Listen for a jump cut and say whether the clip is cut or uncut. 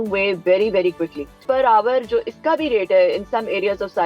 cut